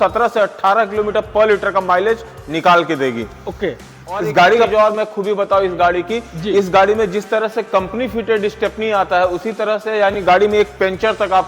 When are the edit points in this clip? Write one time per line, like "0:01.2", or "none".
0:04.7